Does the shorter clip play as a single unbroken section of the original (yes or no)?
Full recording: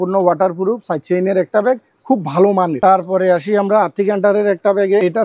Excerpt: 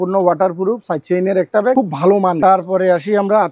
no